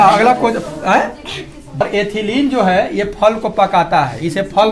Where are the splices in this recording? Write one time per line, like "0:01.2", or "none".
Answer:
0:01.8

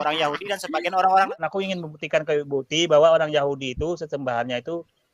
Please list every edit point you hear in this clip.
0:01.3

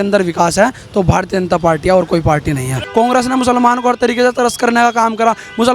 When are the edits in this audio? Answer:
0:02.8

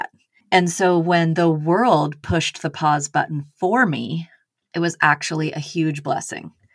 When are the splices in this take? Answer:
none

